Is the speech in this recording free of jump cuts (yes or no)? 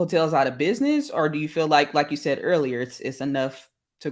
yes